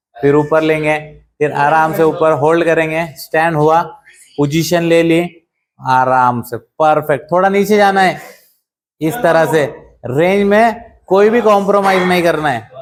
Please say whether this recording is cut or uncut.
uncut